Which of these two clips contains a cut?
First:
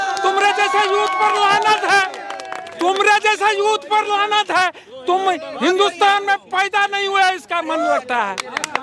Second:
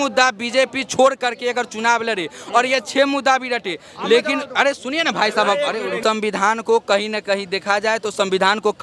second; 1 cut; at 6.0 s

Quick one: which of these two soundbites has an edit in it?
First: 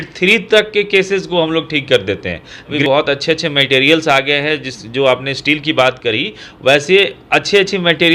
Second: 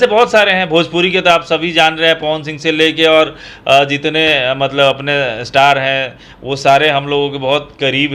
first; 1 cut; at 2.8 s

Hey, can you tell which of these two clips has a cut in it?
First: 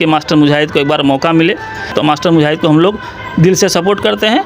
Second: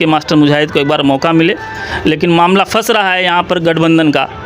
first; 1 cut; at 1.9 s

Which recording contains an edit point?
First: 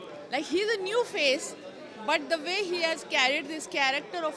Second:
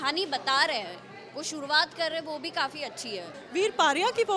second; 1 cut; at 3.4 s

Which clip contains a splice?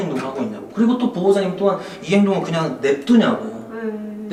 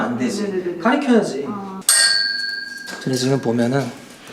second; 1 cut; at 1.9 s

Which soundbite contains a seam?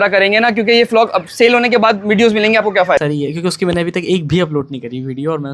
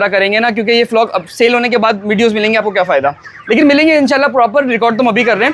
first; 1 cut; at 3.0 s

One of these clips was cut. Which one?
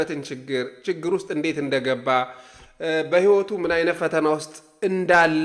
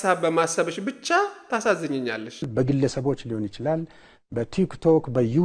second; 1 cut; at 2.4 s

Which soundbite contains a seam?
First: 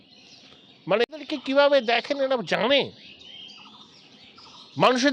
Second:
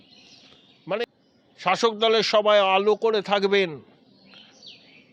second; 1 cut; at 1.2 s

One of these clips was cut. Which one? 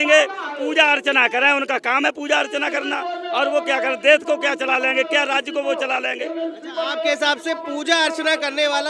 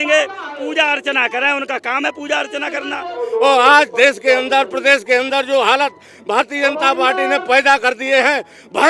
second; 1 cut; at 3.2 s

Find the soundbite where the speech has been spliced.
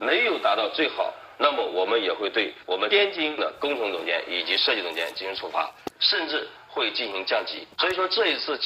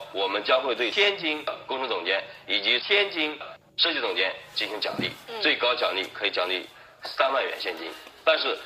second; 1 cut; at 6.6 s

